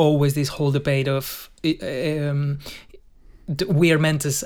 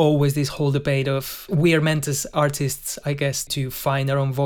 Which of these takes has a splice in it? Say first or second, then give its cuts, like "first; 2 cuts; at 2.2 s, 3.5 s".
second; 2 cuts; at 1.5 s, 3.5 s